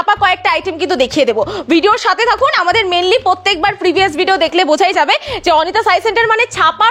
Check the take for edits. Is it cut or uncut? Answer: uncut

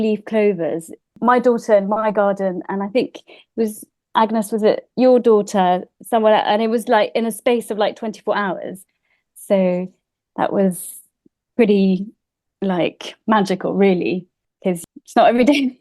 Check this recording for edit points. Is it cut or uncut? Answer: cut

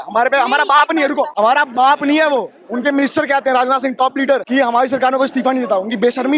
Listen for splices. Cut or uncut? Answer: cut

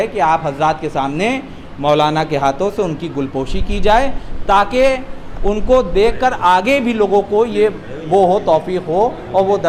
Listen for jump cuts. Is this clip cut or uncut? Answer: uncut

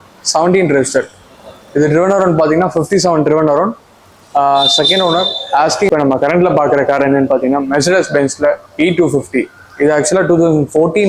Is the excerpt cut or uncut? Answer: cut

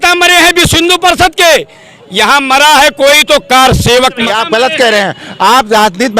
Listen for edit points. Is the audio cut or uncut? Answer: cut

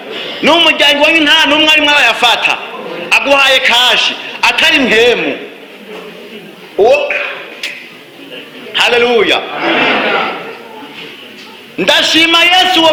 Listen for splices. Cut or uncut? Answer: uncut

